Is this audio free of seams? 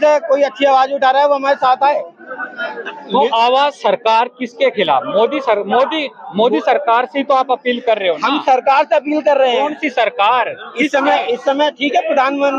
yes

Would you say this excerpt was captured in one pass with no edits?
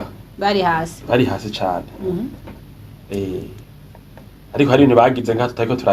yes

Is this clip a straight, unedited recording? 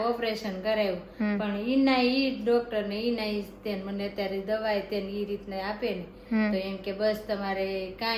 yes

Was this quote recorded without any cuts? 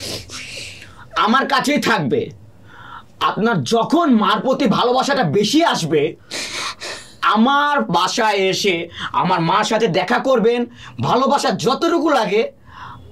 yes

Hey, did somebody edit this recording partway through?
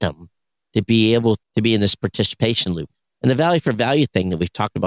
yes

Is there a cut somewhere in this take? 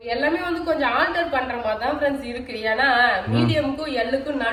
no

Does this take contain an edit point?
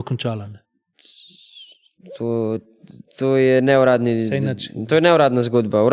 no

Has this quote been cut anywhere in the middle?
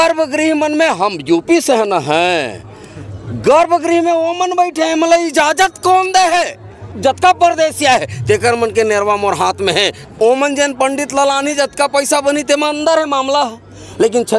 yes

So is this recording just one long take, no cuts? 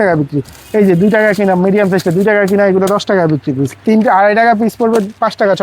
no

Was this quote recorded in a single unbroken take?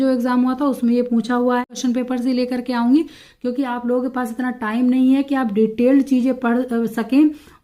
no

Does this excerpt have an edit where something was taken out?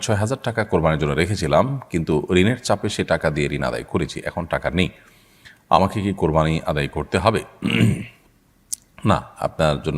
no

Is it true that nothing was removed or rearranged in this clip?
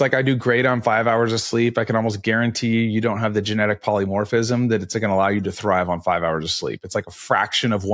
yes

